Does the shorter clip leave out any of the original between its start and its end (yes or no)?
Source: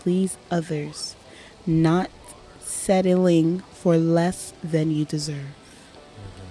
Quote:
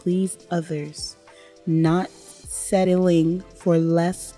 yes